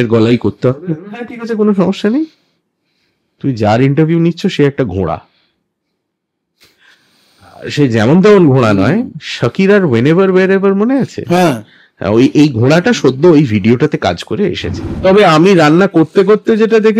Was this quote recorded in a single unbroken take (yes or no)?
no